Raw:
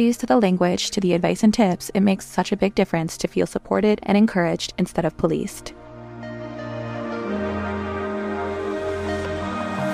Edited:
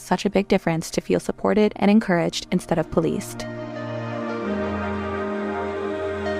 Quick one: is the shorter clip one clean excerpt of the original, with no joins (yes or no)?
no